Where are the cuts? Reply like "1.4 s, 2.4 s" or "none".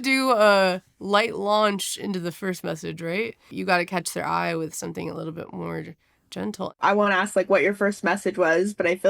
3.5 s, 6.7 s